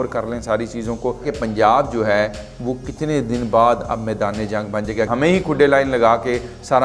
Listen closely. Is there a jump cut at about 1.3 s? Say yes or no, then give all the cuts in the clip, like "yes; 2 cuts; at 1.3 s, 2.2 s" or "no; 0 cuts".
yes; 2 cuts; at 1.3 s, 5.1 s